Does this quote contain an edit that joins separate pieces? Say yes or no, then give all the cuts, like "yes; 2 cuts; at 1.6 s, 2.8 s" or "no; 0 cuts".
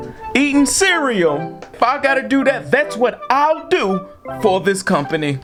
no; 0 cuts